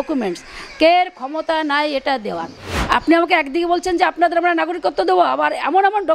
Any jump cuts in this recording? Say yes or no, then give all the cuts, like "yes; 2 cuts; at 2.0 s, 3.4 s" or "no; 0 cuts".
yes; 1 cut; at 2.7 s